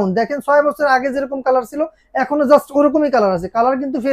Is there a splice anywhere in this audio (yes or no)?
no